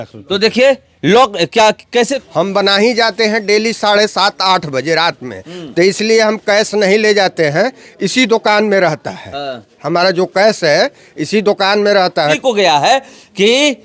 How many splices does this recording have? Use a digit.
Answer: 2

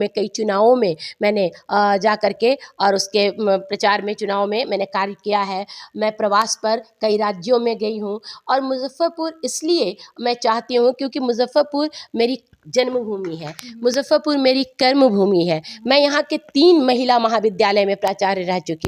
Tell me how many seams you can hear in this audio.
0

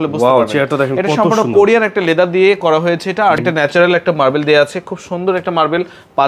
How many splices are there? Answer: 1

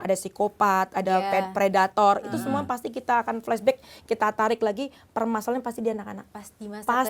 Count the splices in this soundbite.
0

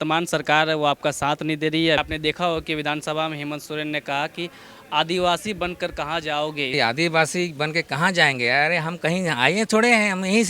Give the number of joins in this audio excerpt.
2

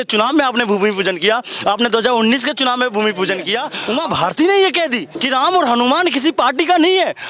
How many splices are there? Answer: 2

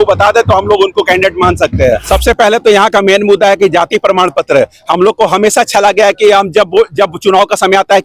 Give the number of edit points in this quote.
1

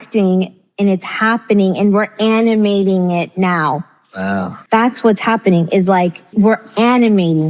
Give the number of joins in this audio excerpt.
2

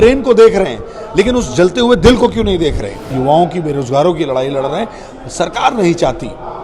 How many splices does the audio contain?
1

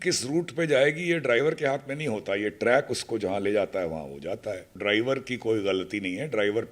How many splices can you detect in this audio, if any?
1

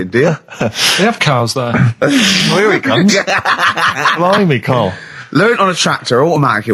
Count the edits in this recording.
0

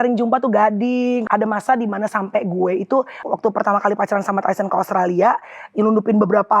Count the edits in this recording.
2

